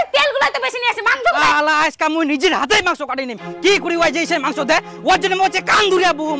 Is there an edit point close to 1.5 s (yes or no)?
yes